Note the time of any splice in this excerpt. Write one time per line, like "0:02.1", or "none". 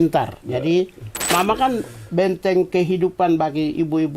0:01.3